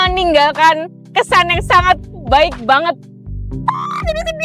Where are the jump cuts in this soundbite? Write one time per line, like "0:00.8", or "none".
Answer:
none